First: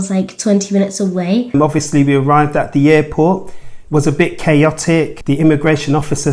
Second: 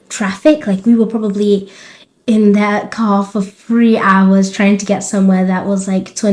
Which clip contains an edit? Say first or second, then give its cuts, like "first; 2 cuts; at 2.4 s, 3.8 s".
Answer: first; 2 cuts; at 1.5 s, 5.2 s